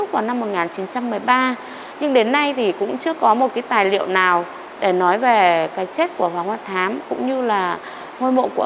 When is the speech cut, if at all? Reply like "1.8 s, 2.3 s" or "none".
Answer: none